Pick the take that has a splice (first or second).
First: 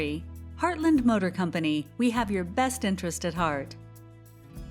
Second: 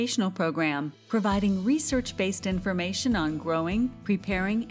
first